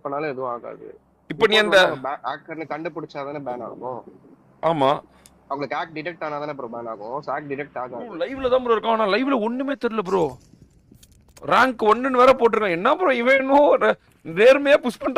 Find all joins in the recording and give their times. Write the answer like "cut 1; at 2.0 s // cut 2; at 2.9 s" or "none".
cut 1; at 8.1 s